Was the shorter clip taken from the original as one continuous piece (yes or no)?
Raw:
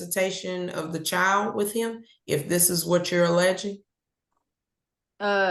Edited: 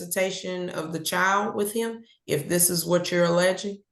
yes